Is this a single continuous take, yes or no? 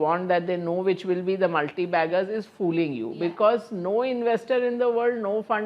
yes